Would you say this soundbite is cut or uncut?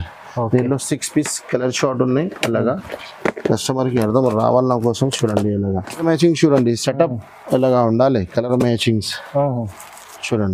cut